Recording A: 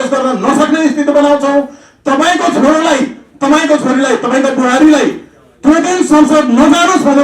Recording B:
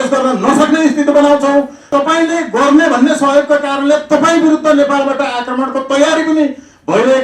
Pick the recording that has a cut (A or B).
B